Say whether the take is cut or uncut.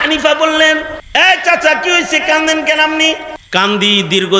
cut